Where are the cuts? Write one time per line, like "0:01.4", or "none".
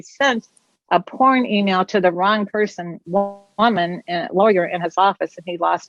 none